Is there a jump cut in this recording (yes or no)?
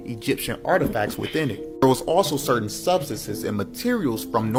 no